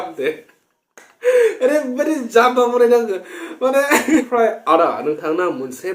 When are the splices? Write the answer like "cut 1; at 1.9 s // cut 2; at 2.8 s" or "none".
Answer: cut 1; at 4.3 s